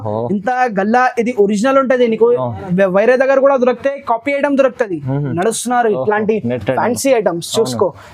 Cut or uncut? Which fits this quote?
cut